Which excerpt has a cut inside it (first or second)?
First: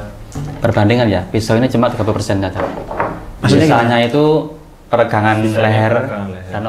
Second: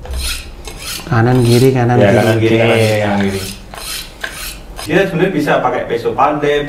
second